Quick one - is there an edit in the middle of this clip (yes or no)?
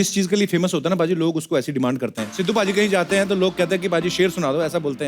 yes